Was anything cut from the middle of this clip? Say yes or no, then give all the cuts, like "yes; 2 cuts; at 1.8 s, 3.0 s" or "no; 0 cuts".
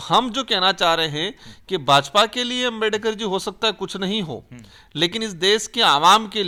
no; 0 cuts